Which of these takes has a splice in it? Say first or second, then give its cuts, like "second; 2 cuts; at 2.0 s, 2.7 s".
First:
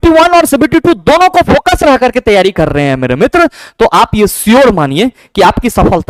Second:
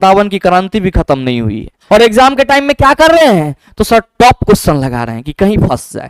second; 1 cut; at 1.8 s